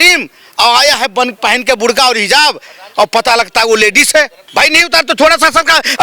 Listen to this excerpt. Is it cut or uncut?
cut